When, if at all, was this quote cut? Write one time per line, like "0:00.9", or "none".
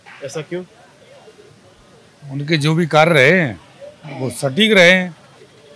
none